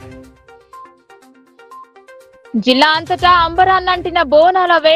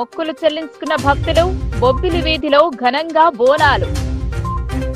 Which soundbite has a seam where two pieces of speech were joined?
first; 2 cuts; at 1.0 s, 2.4 s

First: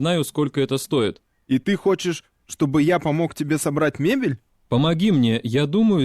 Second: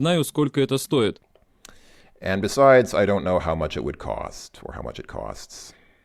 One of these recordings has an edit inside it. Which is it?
first; 2 cuts; at 1.3 s, 4.5 s

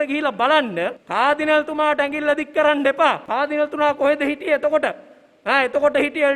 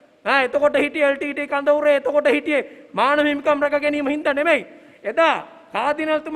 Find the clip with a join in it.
first; 2 cuts; at 1.0 s, 3.2 s

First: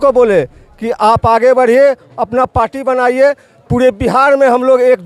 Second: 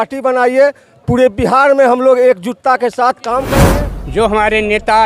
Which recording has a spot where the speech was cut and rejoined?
second; 1 cut; at 3.5 s

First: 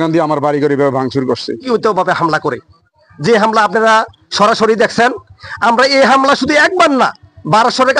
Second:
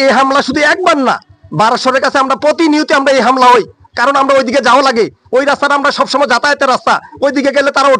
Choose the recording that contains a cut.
first; 1 cut; at 1.6 s

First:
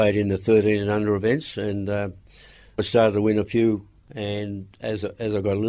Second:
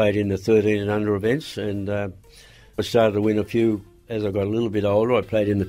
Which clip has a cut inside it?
second; 1 cut; at 4.0 s

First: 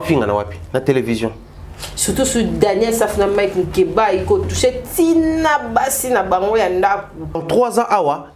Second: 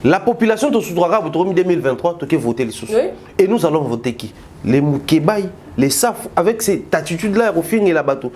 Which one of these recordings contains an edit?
first; 1 cut; at 7.4 s

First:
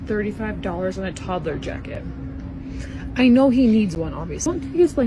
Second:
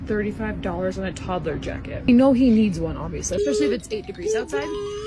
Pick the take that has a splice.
second; 2 cuts; at 2.1 s, 3.1 s

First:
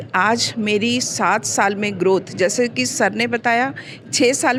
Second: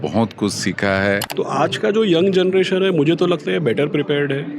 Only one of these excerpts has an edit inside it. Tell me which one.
second; 1 cut; at 1.3 s

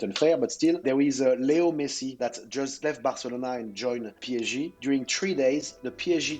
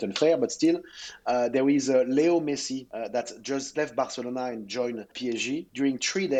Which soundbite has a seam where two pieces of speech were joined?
first; 2 cuts; at 0.8 s, 2.2 s

